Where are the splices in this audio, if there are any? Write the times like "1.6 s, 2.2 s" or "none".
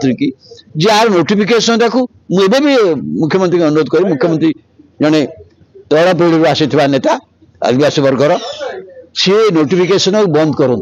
none